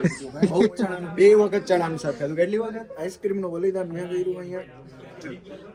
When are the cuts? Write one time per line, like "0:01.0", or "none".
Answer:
none